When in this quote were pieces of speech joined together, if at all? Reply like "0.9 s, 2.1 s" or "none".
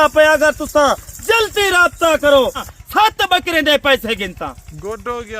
2.7 s